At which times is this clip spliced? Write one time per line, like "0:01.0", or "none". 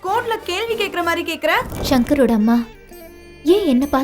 0:01.8